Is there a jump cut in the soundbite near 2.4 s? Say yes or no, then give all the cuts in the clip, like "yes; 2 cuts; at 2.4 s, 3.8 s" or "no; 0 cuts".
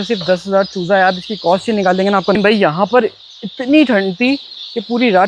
yes; 1 cut; at 2.4 s